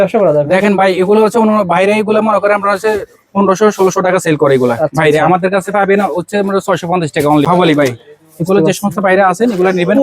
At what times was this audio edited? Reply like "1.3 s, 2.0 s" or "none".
7.5 s